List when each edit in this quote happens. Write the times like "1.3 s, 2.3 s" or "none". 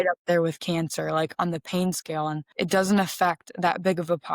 2.4 s